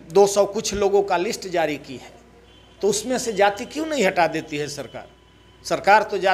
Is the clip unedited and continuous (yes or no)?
yes